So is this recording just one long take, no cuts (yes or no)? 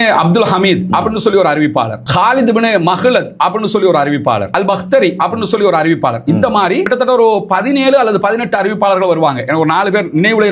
yes